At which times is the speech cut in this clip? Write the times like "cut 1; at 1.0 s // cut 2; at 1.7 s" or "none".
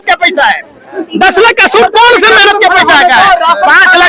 none

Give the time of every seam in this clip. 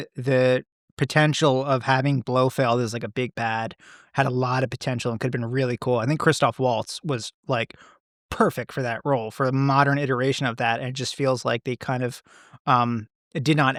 none

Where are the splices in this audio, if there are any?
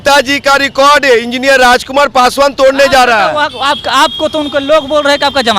none

